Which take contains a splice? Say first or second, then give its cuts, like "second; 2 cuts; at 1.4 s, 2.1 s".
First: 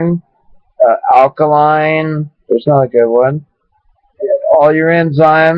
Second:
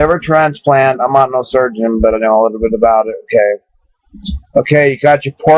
first; 1 cut; at 2.6 s